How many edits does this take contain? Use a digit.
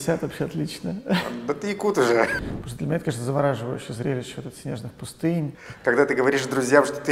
2